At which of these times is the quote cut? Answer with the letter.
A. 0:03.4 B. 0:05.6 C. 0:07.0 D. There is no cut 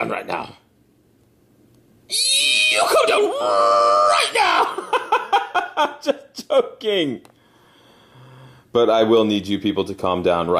C